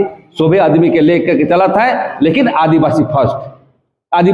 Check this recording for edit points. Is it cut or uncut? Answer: uncut